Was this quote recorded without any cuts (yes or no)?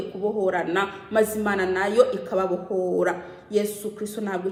yes